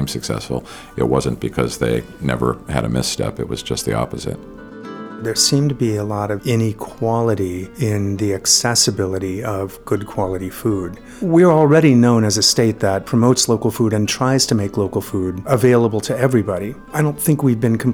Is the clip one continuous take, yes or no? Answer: no